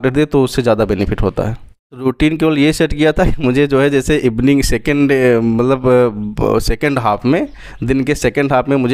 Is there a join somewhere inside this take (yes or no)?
yes